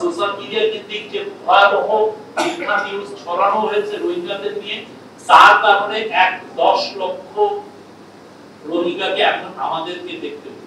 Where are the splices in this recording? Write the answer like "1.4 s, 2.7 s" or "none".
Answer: none

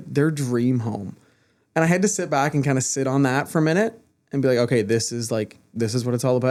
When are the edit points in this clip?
none

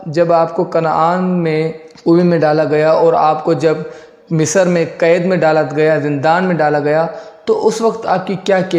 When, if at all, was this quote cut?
1.8 s

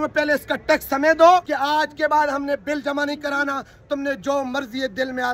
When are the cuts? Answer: 1.5 s

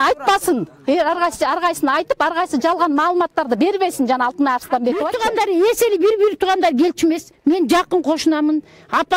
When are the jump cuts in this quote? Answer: 5.1 s

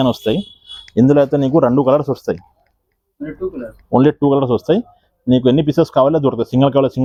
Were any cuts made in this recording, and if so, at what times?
none

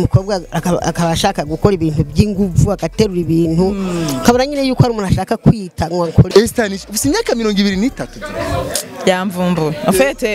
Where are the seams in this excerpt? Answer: 6.3 s

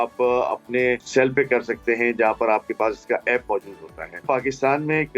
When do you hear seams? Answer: 1.0 s, 4.2 s

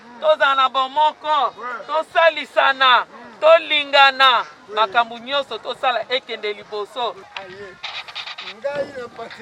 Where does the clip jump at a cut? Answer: 7.3 s

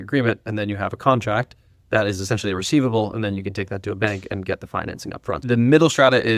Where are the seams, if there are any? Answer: 5.4 s

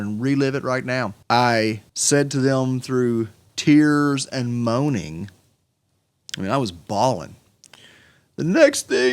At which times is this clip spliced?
1.2 s, 1.9 s, 3.4 s

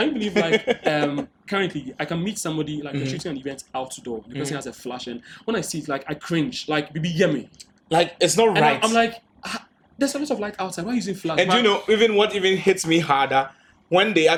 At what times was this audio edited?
none

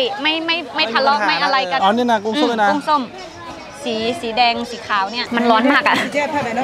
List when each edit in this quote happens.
1.8 s, 5.2 s

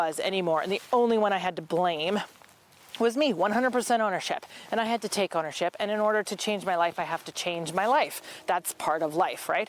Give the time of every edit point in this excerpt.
none

